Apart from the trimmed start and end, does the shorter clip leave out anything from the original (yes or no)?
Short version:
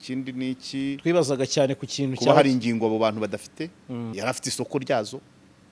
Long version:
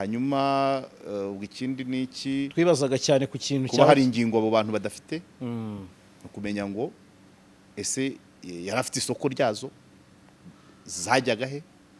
yes